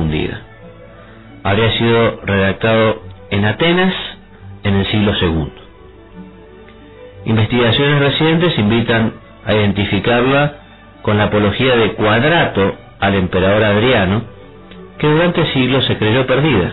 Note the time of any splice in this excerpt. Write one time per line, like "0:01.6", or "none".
none

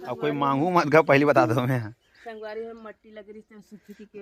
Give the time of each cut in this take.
none

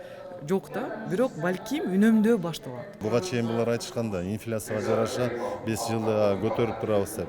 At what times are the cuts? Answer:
0:03.0

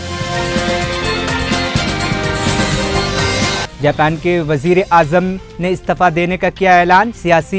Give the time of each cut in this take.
none

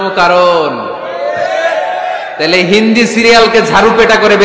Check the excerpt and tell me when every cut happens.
none

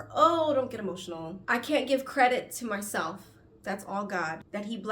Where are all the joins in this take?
0:01.4

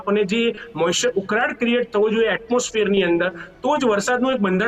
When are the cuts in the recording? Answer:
none

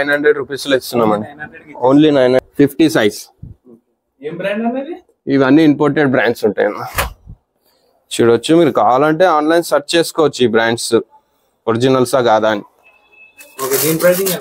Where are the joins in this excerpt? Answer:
0:02.4

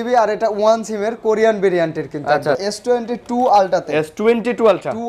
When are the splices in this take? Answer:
0:02.7

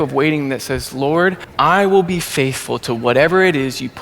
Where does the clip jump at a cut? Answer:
0:01.5

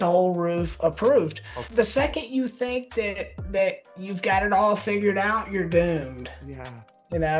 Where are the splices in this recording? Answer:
0:01.6

